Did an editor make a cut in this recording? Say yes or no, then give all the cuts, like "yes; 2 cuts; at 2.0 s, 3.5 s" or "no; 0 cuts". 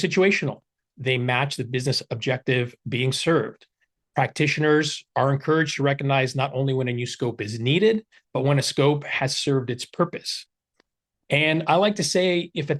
no; 0 cuts